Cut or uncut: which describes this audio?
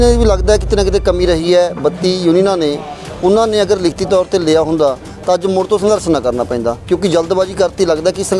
uncut